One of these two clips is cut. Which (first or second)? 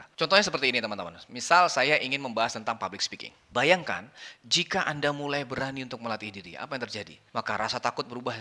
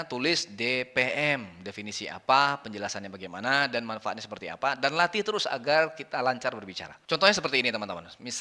first